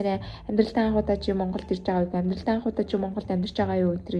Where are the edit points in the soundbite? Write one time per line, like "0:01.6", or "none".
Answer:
none